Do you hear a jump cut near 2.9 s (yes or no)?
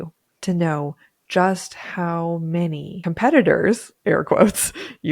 yes